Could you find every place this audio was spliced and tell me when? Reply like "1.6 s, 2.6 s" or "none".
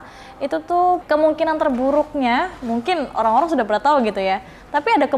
1.0 s